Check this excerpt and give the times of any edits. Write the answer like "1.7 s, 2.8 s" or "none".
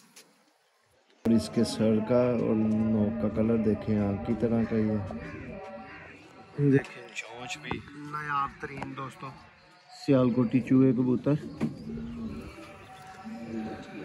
1.3 s